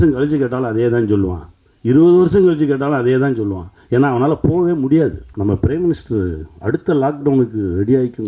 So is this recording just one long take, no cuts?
no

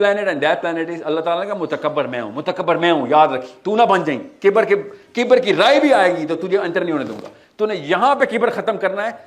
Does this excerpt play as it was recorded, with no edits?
yes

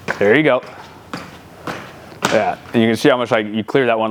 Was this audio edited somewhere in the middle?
no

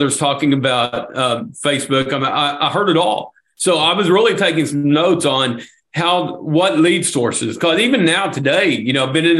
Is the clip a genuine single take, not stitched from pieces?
yes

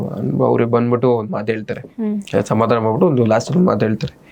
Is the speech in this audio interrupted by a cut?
no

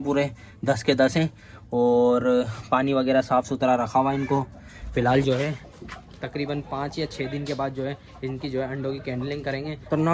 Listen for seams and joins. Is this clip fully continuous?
yes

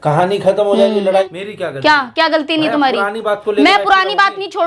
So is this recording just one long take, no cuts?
no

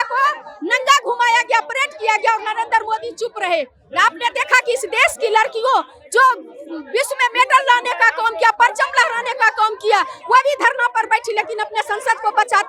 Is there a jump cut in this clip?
no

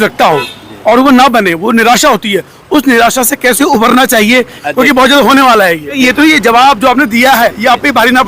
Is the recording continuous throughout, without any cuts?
no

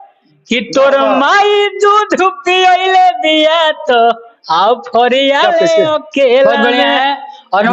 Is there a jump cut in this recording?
no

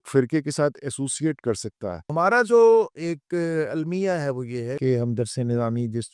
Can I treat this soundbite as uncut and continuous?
no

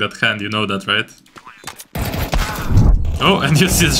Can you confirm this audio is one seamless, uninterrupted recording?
no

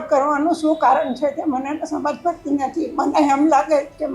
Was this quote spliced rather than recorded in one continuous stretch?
no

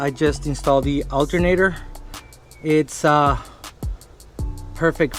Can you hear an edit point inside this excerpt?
no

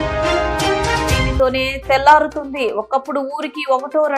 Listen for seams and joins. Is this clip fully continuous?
no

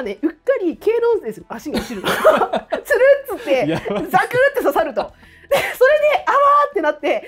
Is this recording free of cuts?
yes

